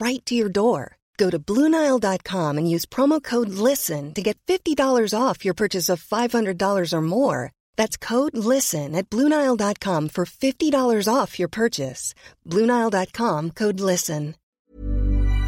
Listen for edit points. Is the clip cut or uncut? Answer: cut